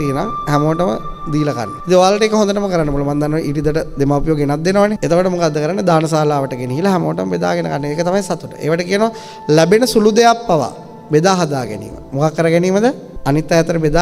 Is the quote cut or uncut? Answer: uncut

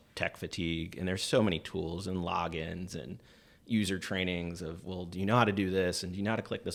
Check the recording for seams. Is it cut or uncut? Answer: uncut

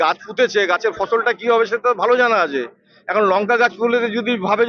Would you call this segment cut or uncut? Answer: uncut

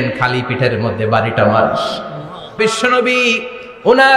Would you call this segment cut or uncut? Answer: cut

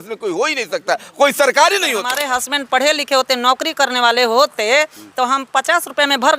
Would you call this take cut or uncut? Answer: cut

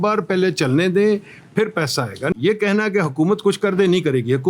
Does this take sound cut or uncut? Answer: cut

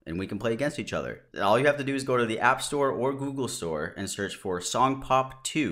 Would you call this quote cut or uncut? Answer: cut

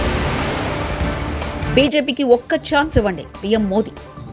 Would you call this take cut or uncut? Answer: uncut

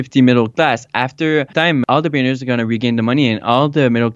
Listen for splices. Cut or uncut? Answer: cut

